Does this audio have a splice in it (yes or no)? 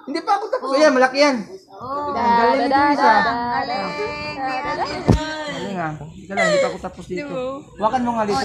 no